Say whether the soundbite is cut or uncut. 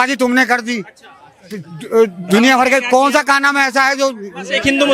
uncut